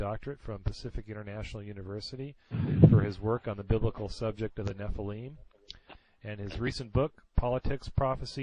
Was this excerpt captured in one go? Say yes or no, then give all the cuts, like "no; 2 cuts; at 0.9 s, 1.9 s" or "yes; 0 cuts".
yes; 0 cuts